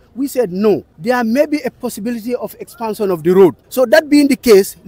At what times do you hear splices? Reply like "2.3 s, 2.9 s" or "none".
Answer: 0.9 s, 3.6 s